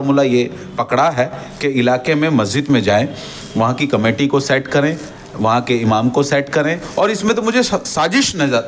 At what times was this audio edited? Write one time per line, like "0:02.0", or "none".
none